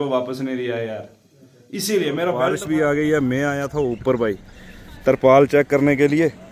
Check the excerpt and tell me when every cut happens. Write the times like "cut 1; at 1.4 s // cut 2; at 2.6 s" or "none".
cut 1; at 2.5 s